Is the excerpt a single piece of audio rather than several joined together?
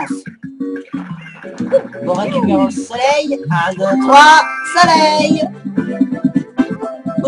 no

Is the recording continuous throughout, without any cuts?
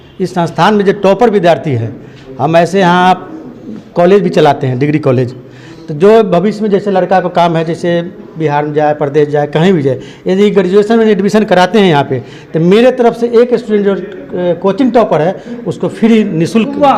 yes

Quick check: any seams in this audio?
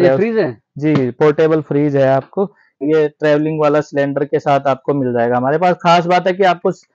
yes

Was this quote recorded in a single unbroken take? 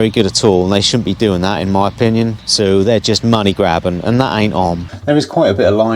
no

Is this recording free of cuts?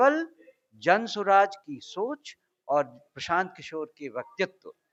yes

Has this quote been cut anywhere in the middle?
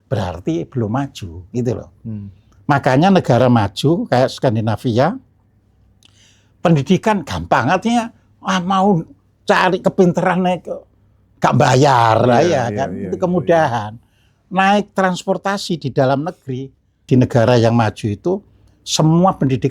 yes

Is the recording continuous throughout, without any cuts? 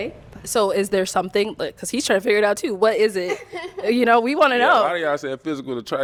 yes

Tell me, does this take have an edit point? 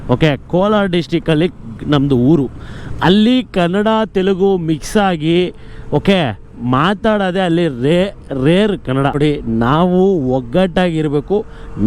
yes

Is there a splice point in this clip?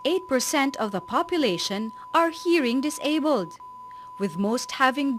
yes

